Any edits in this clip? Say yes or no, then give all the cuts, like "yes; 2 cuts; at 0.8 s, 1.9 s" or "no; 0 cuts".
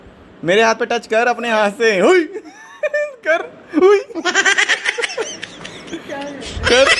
no; 0 cuts